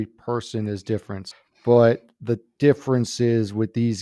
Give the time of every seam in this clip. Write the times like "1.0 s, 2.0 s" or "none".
1.2 s